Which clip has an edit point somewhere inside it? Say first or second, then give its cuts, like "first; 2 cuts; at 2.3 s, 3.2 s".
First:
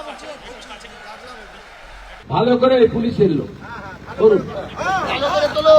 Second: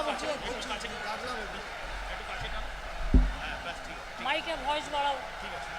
first; 1 cut; at 2.2 s